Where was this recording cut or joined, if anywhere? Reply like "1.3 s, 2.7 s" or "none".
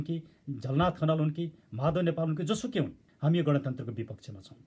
3.0 s